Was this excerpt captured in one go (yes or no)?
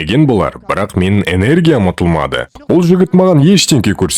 no